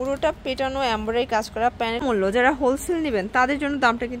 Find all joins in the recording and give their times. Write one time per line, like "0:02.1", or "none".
0:02.0